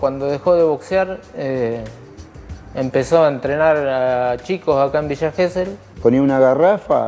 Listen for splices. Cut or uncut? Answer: cut